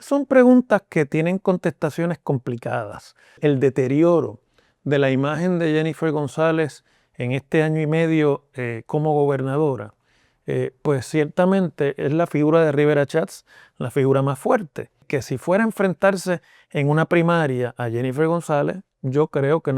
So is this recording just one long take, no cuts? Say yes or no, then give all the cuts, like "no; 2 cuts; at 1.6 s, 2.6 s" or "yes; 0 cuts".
no; 2 cuts; at 3.4 s, 15.0 s